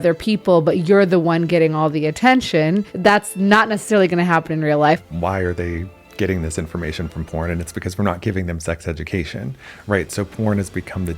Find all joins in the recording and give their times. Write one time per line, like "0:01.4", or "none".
0:05.0